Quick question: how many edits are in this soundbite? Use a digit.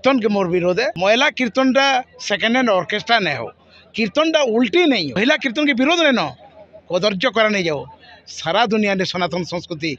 2